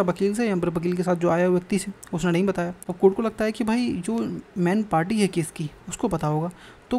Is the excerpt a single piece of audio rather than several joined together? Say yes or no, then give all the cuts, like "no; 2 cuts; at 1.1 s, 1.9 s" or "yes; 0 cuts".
no; 1 cut; at 2.8 s